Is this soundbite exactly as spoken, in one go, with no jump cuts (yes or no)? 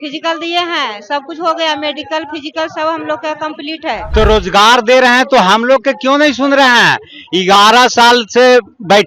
no